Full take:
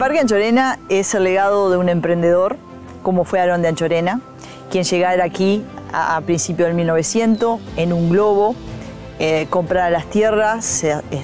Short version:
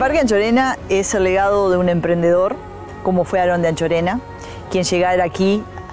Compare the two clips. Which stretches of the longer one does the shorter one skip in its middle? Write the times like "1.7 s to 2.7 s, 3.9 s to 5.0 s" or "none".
none